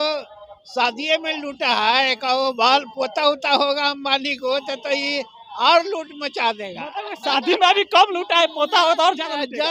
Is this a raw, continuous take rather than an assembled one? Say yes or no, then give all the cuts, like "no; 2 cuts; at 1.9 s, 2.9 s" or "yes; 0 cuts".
yes; 0 cuts